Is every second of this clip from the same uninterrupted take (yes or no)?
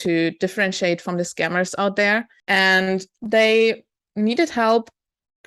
no